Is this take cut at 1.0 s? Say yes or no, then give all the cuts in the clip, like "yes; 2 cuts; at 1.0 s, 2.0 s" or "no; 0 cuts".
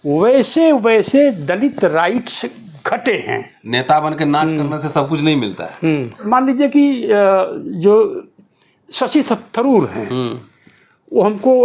no; 2 cuts; at 3.5 s, 6.2 s